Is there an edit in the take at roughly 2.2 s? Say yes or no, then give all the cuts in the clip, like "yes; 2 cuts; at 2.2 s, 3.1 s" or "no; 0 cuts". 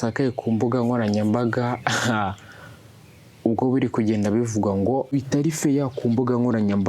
no; 1 cut; at 5.1 s